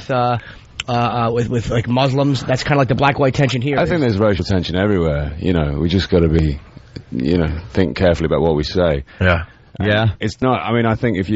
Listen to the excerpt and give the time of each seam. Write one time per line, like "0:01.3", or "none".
0:10.3